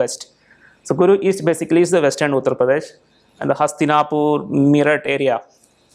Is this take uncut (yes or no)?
yes